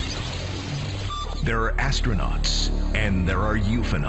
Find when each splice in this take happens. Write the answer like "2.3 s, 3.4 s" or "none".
none